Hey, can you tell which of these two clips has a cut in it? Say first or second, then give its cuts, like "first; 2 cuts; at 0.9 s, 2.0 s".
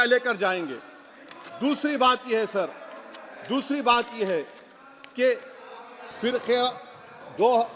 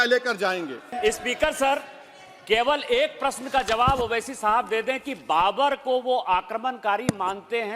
second; 1 cut; at 1.0 s